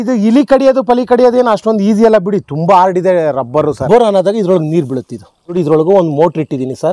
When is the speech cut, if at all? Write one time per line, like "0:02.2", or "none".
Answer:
0:03.8
0:05.6